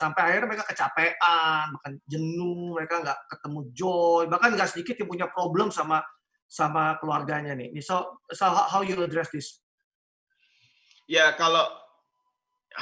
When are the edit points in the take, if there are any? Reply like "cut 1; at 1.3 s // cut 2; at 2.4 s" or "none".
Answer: none